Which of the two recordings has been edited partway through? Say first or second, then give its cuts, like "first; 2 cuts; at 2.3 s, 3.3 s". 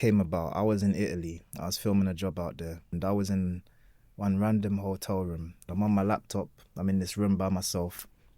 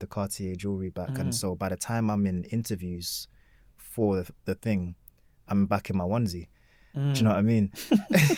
first; 2 cuts; at 2.9 s, 5.6 s